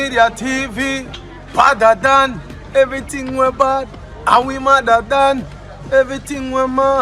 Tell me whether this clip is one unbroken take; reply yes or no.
yes